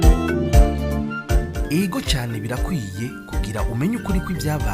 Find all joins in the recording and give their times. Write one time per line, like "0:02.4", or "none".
0:01.3